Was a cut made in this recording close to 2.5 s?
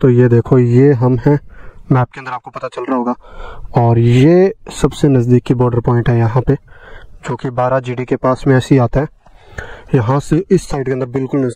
no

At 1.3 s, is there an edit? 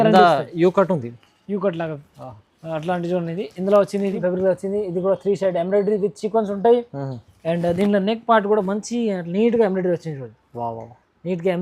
no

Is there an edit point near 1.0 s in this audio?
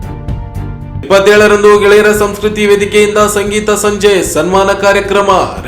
yes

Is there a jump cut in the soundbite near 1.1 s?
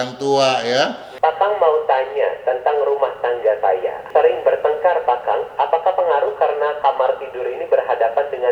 yes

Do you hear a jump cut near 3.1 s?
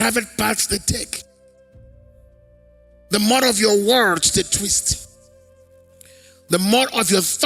yes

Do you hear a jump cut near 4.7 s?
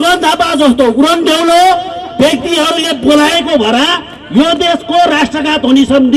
no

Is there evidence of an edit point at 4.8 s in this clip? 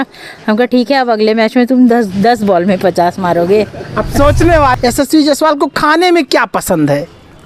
yes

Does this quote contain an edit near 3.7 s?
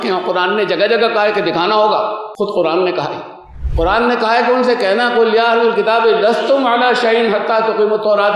no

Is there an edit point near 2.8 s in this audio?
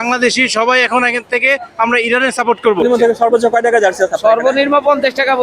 yes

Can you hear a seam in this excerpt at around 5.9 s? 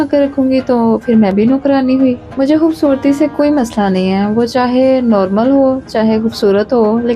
no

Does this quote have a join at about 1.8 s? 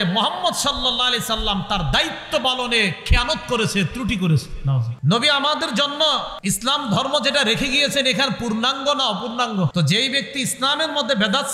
no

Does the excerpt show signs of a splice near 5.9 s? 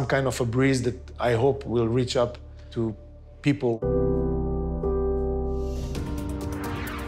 yes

